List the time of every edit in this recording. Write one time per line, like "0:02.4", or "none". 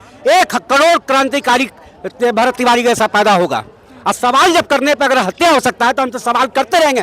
none